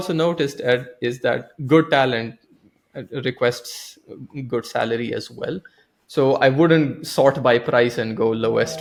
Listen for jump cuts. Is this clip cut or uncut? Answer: uncut